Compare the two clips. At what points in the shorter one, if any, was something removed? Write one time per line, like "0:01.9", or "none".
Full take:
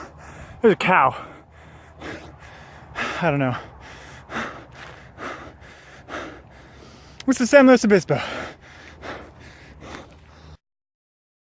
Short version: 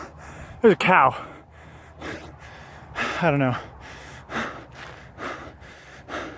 none